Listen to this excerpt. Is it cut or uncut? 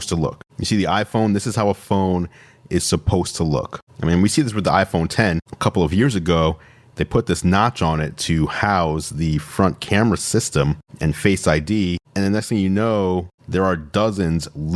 uncut